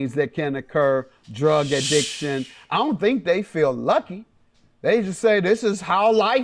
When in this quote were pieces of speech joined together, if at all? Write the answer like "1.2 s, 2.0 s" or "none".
2.8 s